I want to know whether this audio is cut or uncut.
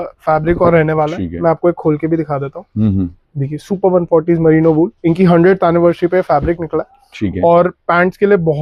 uncut